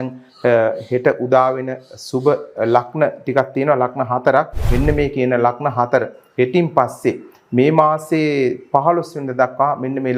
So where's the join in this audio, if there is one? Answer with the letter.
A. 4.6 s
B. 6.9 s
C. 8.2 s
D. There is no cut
A